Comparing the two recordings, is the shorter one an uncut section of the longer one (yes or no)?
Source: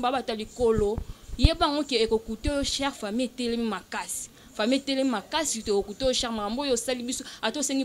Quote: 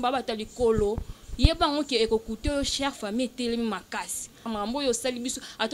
no